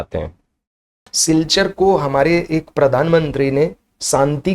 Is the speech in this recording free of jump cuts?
no; 1 cut; at 1.1 s

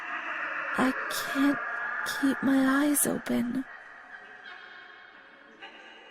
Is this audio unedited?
no; 1 cut; at 3.8 s

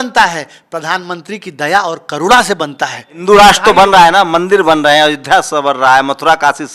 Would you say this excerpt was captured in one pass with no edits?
no; 1 cut; at 3.1 s

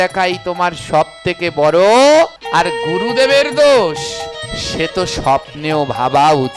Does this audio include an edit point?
yes; 1 cut; at 2.4 s

